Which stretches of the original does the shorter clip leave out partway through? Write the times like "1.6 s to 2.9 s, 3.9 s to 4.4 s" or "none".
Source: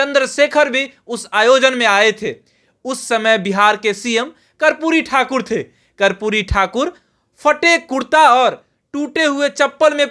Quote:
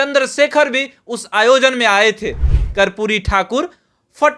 2.6 s to 5.8 s